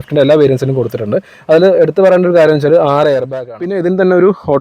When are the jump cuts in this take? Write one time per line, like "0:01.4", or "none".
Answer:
0:03.3